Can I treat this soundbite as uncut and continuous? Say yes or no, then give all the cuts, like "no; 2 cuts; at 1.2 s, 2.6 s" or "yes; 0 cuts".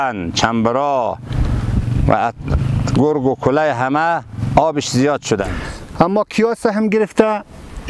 no; 1 cut; at 5.6 s